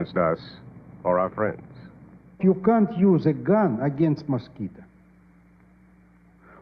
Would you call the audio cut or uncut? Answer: cut